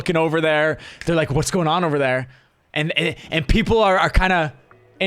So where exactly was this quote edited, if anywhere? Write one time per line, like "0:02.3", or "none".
none